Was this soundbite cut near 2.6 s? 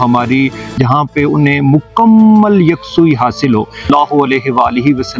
no; 2 cuts; at 0.8 s, 3.9 s

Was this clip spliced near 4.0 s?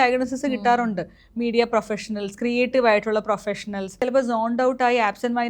yes; 1 cut; at 4.0 s

